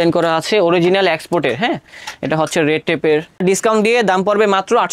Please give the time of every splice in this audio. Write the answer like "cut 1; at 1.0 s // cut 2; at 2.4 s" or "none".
cut 1; at 3.4 s